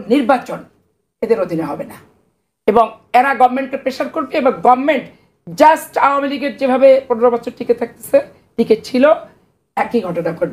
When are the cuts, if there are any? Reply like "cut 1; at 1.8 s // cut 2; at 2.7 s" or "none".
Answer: none

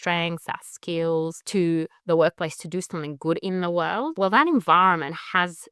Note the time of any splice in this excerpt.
cut 1; at 1.4 s // cut 2; at 4.1 s

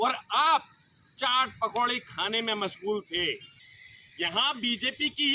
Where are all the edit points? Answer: cut 1; at 3.5 s

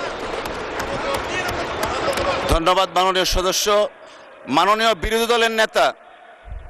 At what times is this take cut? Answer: none

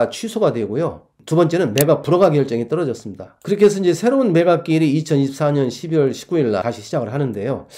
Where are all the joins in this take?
cut 1; at 6.6 s

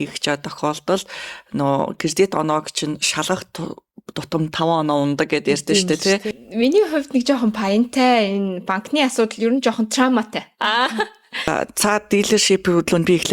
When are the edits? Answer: cut 1; at 6.3 s // cut 2; at 11.5 s

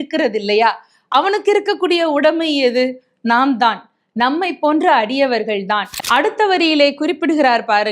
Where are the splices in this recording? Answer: cut 1; at 6.0 s

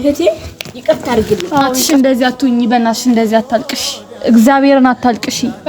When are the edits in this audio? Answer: cut 1; at 1.8 s

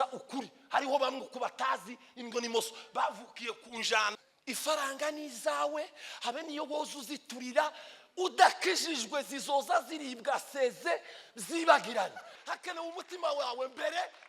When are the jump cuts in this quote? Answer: cut 1; at 4.1 s // cut 2; at 12.3 s

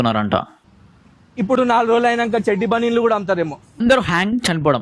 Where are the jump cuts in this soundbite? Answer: cut 1; at 3.8 s

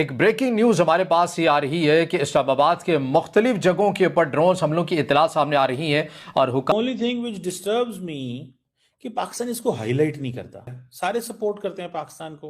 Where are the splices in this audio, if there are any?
cut 1; at 6.7 s

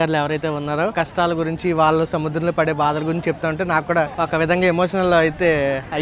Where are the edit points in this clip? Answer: cut 1; at 0.9 s // cut 2; at 4.1 s

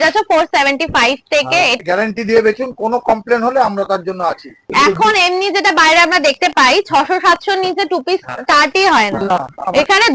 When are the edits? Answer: cut 1; at 1.8 s // cut 2; at 4.6 s

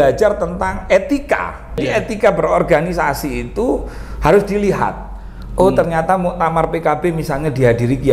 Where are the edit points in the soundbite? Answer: cut 1; at 1.8 s

